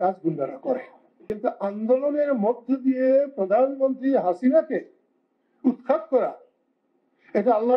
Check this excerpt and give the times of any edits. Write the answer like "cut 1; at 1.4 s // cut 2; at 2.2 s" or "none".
cut 1; at 1.3 s